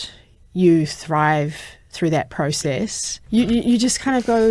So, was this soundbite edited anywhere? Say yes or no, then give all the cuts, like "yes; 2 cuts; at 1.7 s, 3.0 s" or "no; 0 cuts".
yes; 1 cut; at 3.1 s